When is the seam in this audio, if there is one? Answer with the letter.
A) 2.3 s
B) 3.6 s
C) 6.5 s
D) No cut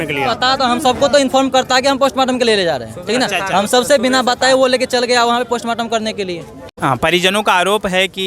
C